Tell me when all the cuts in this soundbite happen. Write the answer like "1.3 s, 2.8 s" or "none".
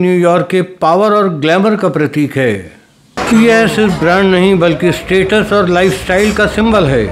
3.1 s